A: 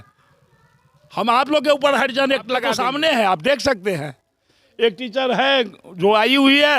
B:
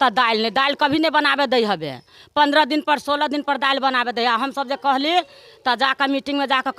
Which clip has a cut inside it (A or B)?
A